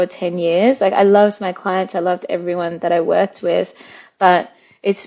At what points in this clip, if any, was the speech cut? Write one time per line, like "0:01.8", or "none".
none